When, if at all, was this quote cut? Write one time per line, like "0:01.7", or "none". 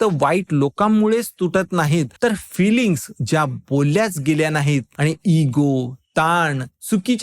0:02.1
0:04.9